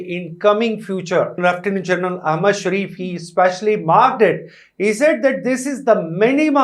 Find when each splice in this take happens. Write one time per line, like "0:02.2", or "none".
0:01.3